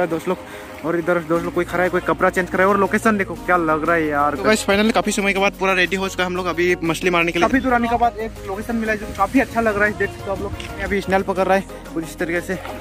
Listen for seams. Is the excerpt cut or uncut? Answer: cut